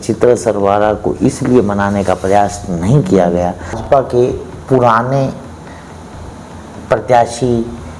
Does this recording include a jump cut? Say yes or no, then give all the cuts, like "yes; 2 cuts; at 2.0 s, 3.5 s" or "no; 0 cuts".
yes; 1 cut; at 3.8 s